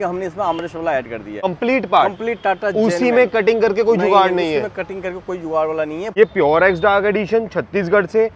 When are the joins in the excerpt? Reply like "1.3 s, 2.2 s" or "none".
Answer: 1.3 s, 6.0 s